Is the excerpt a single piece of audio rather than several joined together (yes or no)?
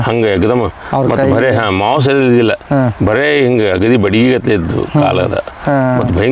yes